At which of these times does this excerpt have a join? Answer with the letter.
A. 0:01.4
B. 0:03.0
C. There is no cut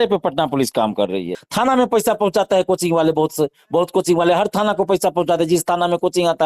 A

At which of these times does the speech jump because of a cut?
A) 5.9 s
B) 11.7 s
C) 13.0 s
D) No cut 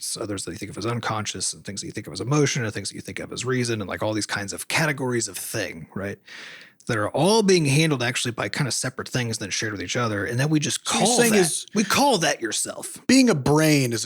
C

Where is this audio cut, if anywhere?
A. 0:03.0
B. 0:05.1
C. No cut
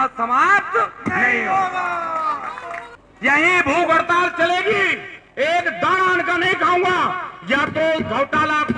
A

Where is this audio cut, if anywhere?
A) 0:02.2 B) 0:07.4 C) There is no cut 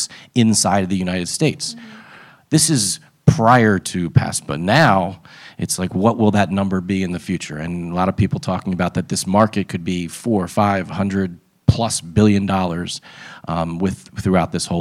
C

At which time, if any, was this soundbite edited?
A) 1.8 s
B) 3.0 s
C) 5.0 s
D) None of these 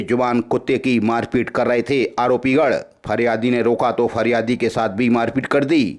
D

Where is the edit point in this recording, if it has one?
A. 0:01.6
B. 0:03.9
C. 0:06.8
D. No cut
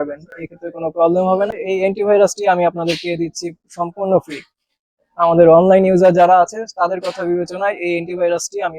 A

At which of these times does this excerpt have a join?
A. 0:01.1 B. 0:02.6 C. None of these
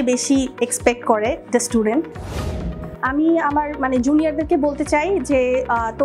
B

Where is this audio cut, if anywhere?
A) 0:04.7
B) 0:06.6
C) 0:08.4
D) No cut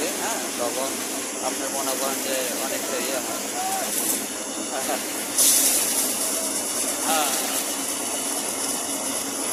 D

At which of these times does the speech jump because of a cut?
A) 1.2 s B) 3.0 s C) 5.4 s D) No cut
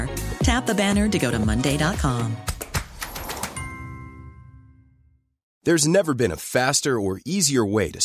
C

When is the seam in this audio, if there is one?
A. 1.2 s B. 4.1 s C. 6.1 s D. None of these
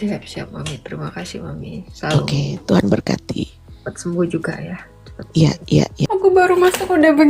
C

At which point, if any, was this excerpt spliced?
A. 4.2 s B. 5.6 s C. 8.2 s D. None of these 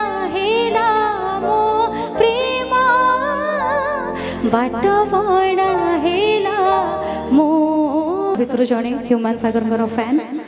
C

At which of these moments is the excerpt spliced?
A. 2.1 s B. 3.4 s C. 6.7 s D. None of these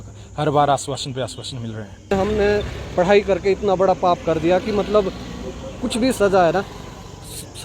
A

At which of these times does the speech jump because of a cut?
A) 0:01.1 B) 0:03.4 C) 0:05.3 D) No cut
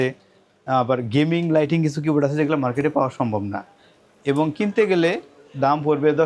D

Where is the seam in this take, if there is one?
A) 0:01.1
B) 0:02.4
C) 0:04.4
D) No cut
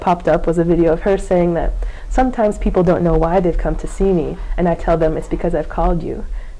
D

